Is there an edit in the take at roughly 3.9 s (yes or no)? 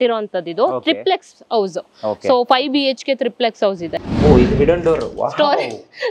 yes